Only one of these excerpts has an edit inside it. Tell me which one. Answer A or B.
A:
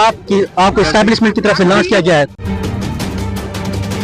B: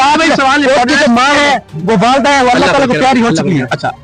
A